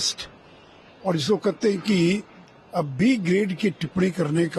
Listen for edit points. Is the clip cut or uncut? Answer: uncut